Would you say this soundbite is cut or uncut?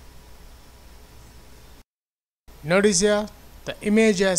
uncut